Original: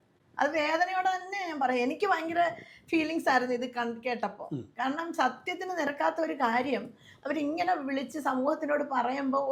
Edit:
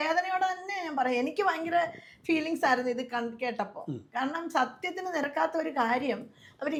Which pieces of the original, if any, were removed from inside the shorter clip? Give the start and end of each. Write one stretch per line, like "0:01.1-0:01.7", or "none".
none